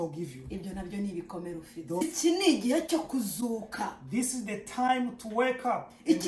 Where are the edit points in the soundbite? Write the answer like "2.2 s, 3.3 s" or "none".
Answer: 2.0 s